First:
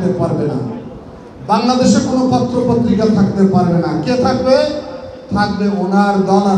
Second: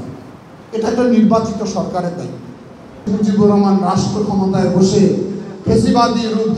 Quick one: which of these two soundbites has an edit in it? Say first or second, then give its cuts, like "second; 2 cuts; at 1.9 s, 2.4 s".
second; 1 cut; at 3.1 s